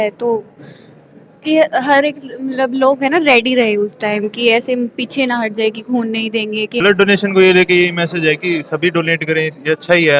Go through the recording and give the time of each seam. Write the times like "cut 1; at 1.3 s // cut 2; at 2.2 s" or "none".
cut 1; at 6.7 s